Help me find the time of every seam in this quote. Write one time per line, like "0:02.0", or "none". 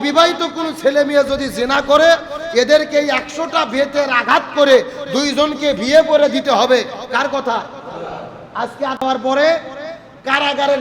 none